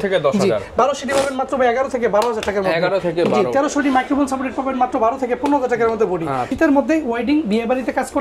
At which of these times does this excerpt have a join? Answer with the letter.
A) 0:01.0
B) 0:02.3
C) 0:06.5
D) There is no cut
C